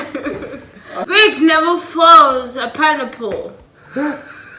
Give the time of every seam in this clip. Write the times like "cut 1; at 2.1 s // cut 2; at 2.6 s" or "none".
cut 1; at 1.0 s